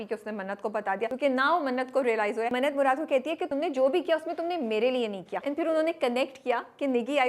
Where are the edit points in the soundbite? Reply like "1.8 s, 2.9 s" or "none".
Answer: 1.1 s, 2.5 s, 3.5 s, 5.3 s